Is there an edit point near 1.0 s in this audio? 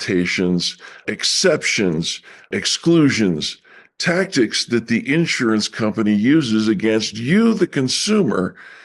yes; 2 cuts; at 1.0 s, 2.5 s

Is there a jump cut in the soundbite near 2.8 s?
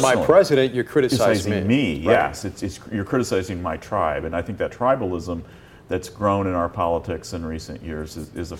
no; 0 cuts

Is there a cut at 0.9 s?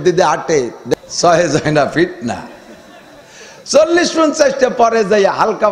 yes; 1 cut; at 0.9 s

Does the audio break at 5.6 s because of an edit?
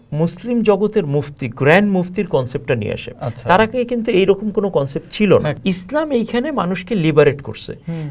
yes; 1 cut; at 5.6 s

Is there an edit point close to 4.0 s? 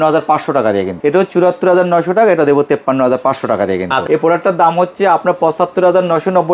yes; 2 cuts; at 0.9 s, 4.0 s

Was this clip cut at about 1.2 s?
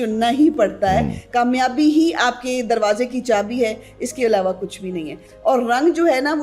yes; 2 cuts; at 1.2 s, 5.2 s

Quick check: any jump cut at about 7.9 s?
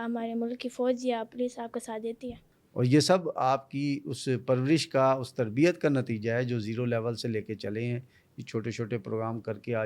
no; 1 cut; at 2.4 s

